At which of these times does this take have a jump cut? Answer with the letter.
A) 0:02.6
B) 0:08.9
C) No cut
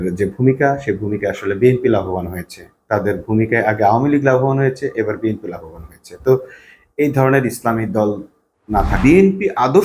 B